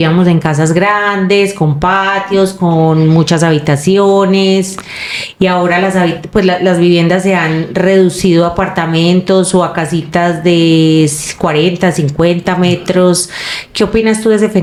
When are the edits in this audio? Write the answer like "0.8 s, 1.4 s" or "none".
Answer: none